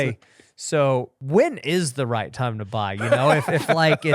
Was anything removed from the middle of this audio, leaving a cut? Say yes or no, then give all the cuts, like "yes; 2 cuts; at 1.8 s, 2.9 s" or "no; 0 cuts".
yes; 1 cut; at 1.2 s